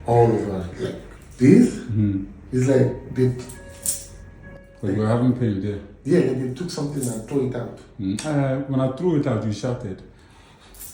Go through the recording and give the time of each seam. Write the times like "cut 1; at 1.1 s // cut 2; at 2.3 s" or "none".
cut 1; at 1.1 s